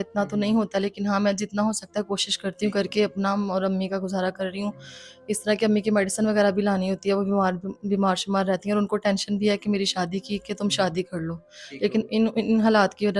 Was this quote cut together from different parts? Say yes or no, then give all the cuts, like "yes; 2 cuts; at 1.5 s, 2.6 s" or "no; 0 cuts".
no; 0 cuts